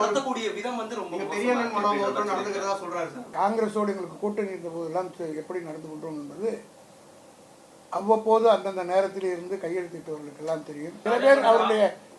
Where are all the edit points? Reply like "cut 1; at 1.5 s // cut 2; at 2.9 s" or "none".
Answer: cut 1; at 3.3 s // cut 2; at 10.9 s

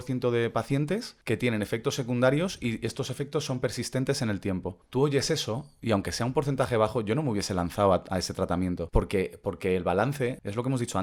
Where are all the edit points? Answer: none

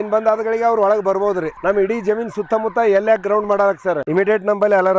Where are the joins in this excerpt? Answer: cut 1; at 1.5 s // cut 2; at 4.0 s

